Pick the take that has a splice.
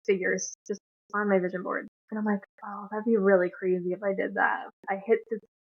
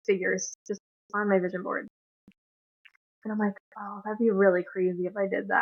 first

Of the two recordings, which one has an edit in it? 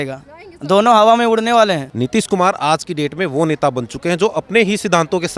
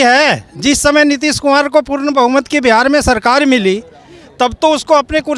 first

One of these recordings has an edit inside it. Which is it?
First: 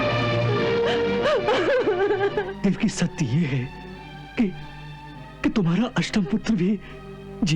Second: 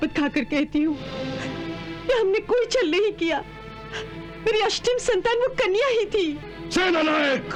first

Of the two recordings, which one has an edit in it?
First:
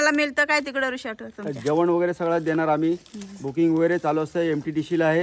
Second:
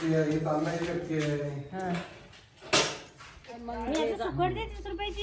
second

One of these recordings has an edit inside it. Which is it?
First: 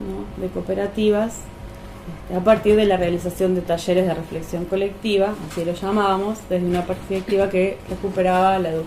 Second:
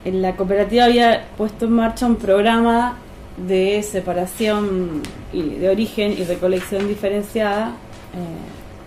first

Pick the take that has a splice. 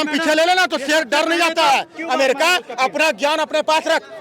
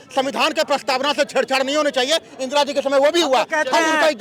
first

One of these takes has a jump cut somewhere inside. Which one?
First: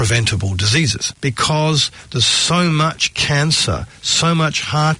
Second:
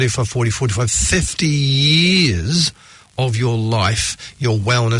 first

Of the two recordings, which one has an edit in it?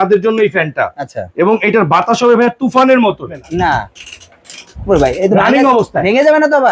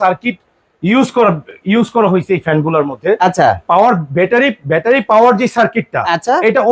first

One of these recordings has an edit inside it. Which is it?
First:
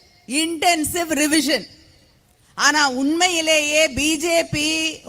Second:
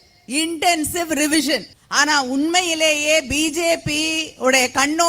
second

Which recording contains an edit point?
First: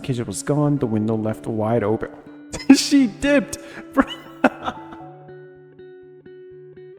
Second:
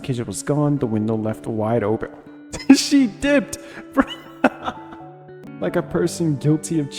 second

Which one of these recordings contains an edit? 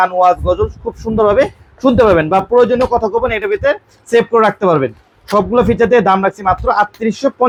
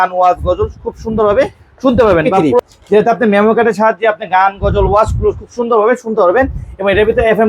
second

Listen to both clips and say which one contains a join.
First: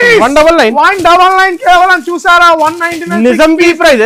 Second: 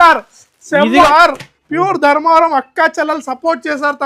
second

